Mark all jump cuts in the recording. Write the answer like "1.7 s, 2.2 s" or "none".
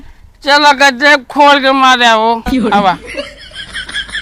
2.9 s